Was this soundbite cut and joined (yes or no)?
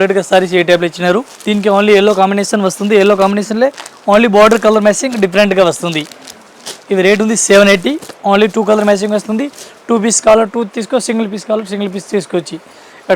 no